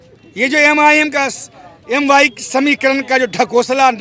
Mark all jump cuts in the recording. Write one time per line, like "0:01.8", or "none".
none